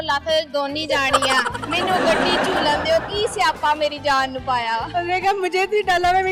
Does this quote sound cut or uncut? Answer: uncut